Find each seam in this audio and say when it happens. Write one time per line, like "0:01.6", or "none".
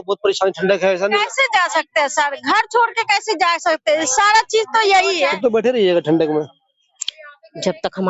0:05.4